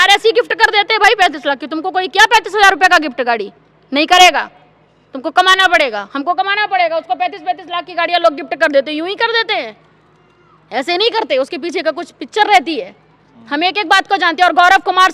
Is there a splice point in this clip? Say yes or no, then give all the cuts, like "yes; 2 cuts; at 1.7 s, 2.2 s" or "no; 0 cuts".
no; 0 cuts